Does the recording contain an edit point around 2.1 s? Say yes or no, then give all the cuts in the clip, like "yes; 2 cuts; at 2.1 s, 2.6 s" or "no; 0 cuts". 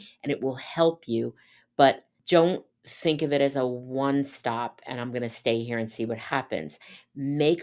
yes; 1 cut; at 2.1 s